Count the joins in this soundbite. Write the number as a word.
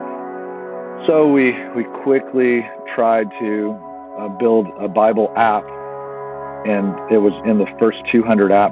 one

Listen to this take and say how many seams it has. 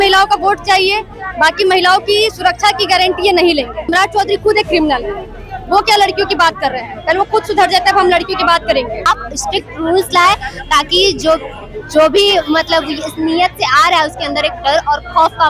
two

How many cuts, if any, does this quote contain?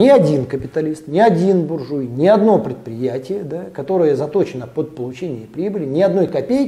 zero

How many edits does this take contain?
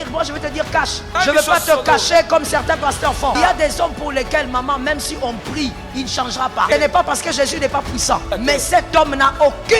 four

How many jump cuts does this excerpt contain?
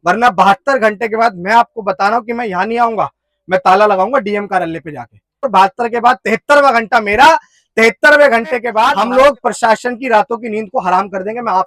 two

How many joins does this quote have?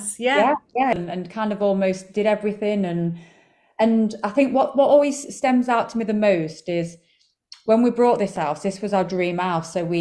one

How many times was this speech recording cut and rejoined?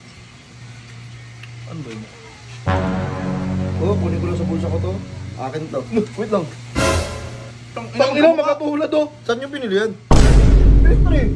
zero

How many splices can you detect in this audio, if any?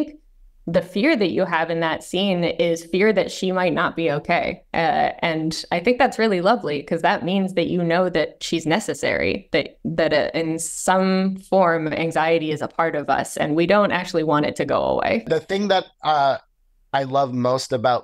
one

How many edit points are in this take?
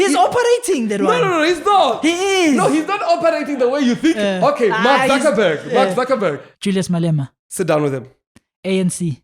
two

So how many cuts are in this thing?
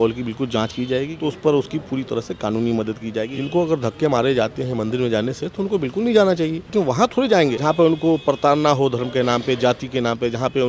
four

